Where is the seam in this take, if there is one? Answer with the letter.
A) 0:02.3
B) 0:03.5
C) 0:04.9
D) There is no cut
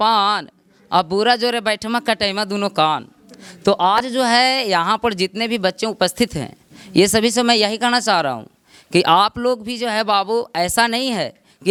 D